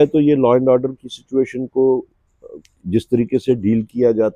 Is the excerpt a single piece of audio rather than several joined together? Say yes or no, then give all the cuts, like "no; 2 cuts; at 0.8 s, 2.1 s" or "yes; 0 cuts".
yes; 0 cuts